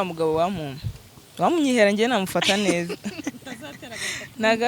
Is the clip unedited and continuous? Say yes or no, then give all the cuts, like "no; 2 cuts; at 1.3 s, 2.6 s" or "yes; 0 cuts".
yes; 0 cuts